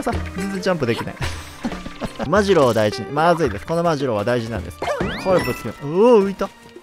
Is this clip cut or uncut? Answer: cut